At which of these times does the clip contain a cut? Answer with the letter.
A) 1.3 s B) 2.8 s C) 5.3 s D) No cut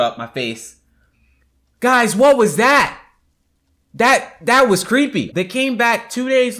C